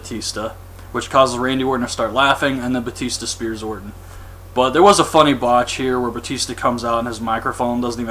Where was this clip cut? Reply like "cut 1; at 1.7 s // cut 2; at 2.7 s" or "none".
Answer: none